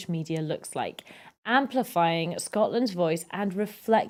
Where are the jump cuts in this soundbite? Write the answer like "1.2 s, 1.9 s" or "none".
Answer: none